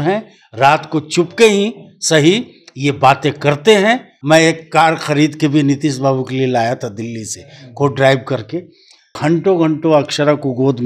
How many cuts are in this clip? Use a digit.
2